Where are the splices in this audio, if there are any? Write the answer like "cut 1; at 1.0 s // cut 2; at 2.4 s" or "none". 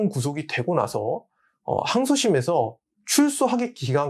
none